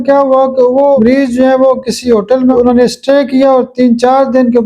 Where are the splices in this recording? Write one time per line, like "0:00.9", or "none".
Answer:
none